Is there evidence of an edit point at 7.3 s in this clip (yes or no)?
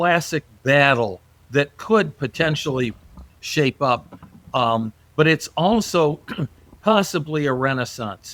no